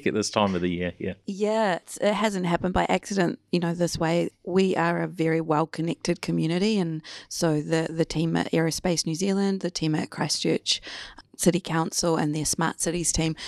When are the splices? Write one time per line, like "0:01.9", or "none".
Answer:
0:01.8
0:04.3